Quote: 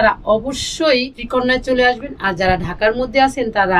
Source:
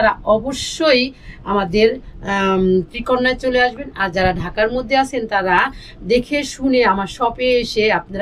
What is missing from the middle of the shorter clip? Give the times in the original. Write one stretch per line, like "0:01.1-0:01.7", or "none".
0:01.2-0:03.0